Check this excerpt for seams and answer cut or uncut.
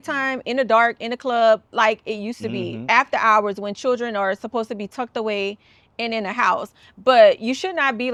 uncut